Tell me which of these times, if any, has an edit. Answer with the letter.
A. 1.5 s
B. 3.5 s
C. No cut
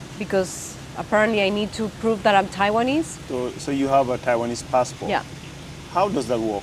B